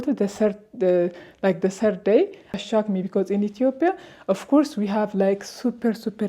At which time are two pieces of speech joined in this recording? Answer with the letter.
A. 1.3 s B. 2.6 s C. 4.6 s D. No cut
B